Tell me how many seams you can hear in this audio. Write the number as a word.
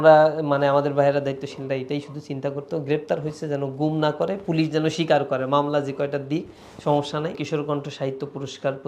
one